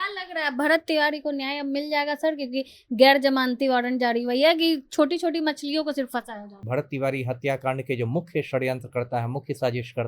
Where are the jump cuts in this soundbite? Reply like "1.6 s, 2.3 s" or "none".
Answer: 6.6 s